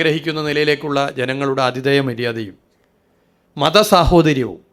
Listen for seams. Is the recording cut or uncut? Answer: uncut